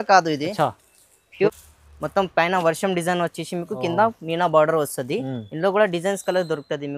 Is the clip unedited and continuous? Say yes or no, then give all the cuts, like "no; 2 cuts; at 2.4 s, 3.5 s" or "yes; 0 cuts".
no; 1 cut; at 1.5 s